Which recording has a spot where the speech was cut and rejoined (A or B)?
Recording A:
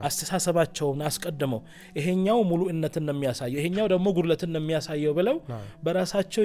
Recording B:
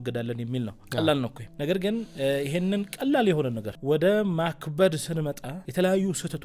B